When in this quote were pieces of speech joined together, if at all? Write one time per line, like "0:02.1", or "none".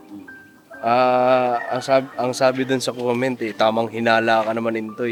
none